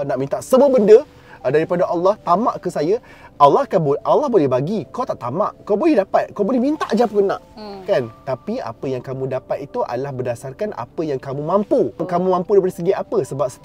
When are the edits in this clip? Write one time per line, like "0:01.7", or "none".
none